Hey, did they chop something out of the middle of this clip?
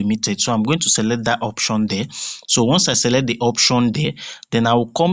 no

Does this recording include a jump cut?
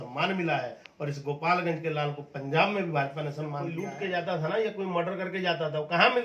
yes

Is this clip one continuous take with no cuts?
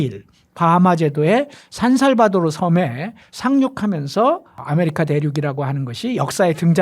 no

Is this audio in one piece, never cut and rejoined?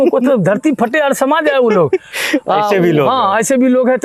yes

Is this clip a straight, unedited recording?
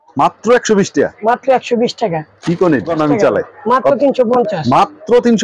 no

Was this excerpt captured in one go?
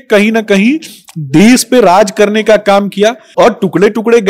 no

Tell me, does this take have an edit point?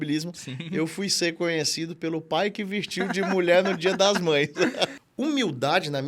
yes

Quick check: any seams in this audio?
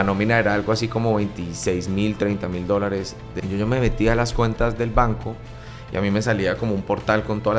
yes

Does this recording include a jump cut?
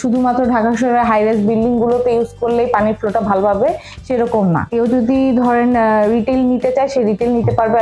yes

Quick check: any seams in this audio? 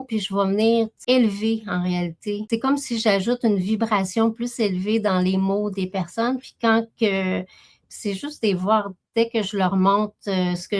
yes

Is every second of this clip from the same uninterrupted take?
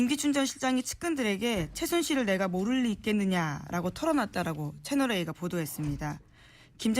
no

